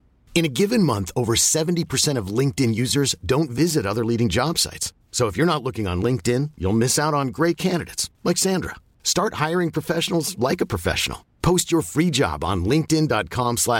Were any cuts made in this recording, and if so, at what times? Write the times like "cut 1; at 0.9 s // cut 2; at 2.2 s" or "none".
none